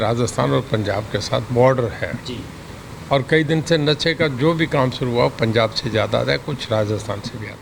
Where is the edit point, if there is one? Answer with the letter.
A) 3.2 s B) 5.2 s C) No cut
C